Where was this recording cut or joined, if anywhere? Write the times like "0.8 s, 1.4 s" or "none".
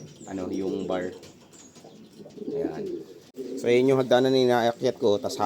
3.2 s